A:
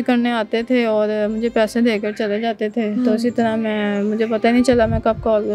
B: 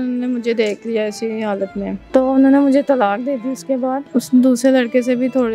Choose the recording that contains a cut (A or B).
B